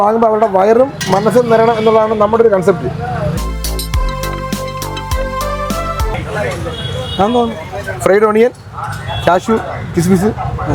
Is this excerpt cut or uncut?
uncut